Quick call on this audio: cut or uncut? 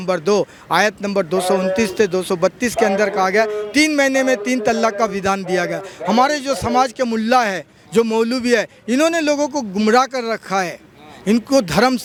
uncut